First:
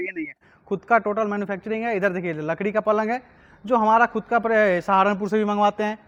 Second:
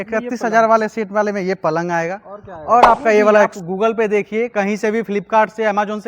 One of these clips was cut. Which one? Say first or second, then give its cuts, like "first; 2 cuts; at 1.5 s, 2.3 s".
second; 1 cut; at 3.6 s